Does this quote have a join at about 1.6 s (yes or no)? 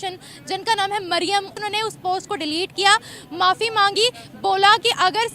yes